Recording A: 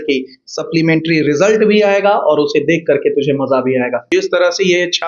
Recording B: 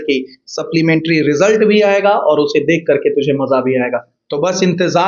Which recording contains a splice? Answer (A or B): A